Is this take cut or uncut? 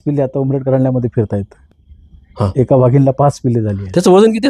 uncut